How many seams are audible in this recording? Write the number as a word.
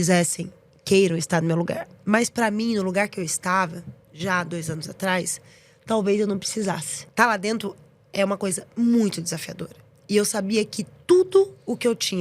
one